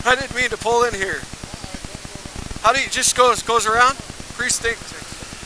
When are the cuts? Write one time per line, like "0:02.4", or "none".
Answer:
none